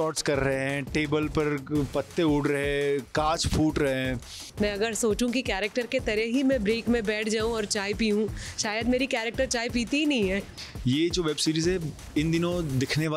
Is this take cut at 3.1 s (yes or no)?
no